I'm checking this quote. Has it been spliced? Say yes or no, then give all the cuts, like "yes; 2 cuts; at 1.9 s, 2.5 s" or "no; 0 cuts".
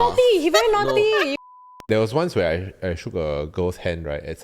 yes; 1 cut; at 1.4 s